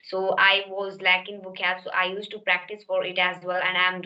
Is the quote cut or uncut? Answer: uncut